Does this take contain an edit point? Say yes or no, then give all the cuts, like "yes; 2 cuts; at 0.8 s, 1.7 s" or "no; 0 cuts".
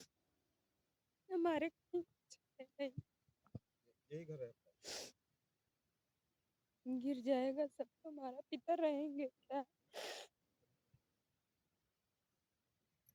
no; 0 cuts